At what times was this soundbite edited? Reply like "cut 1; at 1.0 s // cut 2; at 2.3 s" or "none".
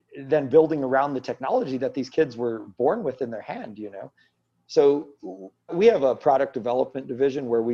cut 1; at 5.7 s